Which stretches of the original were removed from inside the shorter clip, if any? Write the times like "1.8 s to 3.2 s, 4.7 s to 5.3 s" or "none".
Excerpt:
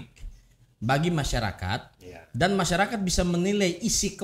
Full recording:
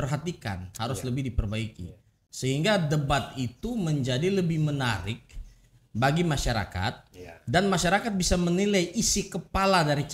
none